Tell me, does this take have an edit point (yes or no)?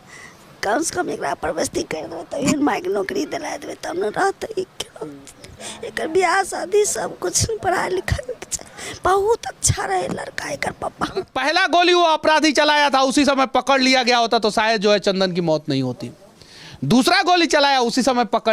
yes